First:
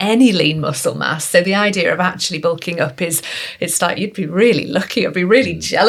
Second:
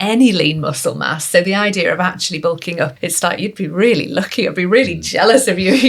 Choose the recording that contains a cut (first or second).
second